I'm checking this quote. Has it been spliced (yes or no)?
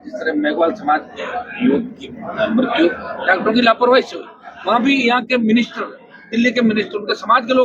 no